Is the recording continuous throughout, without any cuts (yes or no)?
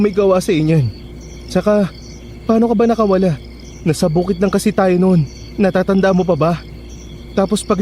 yes